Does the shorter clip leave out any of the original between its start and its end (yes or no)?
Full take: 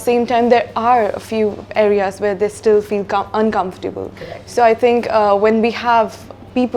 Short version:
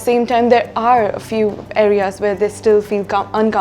no